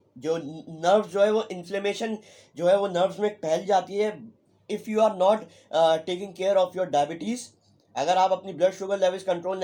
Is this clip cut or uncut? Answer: uncut